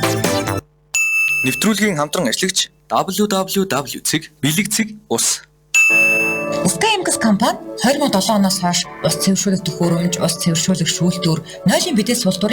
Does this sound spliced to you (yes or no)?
yes